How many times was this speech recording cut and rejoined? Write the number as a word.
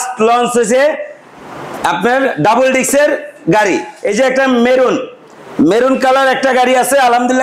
one